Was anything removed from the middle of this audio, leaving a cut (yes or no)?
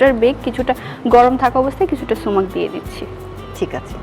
no